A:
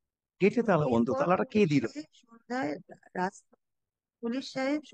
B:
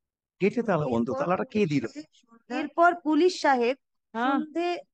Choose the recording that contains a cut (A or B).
B